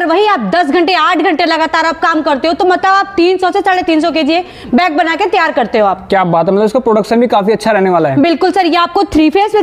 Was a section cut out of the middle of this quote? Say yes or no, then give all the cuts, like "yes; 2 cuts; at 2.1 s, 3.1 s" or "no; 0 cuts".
no; 0 cuts